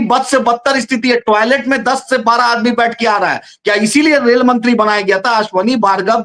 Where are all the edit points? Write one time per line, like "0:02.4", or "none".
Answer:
none